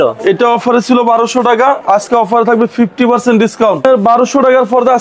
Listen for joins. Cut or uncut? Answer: cut